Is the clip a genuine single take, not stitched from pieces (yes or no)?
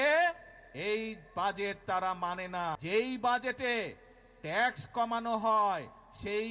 no